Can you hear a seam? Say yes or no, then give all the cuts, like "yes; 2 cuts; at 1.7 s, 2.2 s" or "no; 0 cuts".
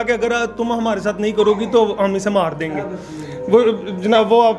no; 0 cuts